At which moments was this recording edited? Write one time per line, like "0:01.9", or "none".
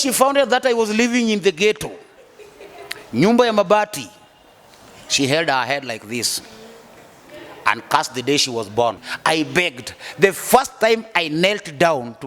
0:09.1